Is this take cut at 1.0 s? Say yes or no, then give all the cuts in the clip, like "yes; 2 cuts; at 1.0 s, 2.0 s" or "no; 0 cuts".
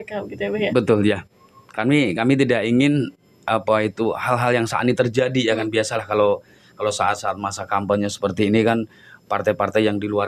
no; 0 cuts